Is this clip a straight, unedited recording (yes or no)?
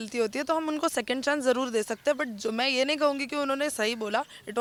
yes